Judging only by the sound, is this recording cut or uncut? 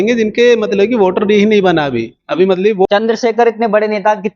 cut